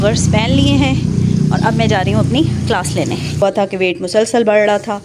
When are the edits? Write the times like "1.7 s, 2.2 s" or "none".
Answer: 3.4 s